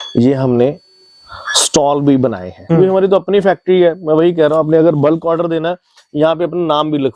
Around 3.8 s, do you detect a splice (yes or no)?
no